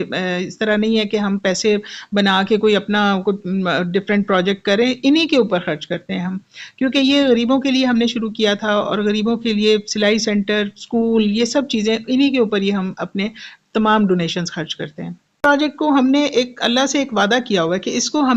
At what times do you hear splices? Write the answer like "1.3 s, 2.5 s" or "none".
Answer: 15.4 s